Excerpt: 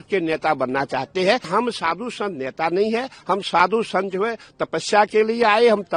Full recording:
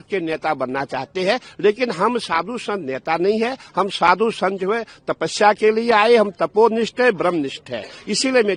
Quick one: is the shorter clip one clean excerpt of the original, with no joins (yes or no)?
no